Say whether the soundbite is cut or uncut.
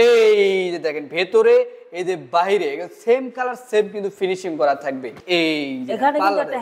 cut